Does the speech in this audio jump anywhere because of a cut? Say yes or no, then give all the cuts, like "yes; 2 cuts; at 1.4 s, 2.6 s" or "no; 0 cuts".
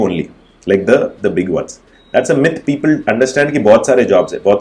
no; 0 cuts